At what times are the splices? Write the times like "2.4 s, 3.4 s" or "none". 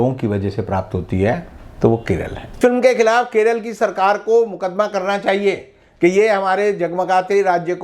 2.6 s